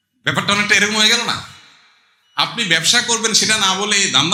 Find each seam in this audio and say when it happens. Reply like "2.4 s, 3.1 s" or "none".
none